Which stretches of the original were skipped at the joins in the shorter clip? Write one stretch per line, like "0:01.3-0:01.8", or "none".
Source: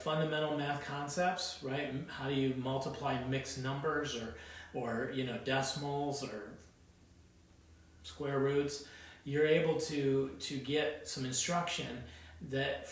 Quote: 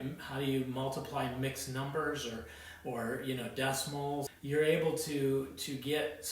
0:06.2-0:09.2